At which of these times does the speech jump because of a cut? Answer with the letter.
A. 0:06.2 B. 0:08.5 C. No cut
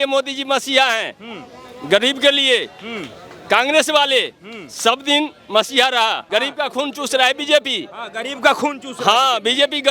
A